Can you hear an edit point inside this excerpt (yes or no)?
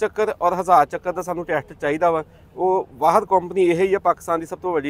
no